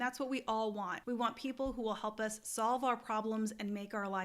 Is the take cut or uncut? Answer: cut